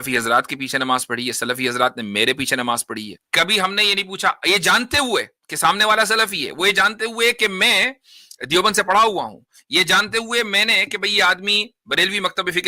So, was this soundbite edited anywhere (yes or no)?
yes